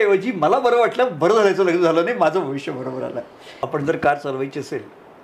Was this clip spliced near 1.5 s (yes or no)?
no